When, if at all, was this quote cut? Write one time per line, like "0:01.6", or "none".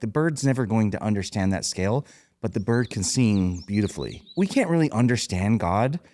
0:04.3